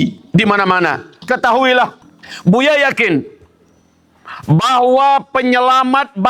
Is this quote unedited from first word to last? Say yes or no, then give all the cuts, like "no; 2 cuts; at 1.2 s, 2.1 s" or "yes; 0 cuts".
no; 1 cut; at 1.1 s